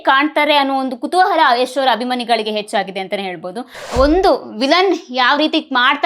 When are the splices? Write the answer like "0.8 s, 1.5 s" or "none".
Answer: 3.8 s